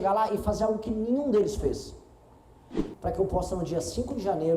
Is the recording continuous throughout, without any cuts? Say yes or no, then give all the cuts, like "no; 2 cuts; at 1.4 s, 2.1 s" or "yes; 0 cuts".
no; 1 cut; at 2.7 s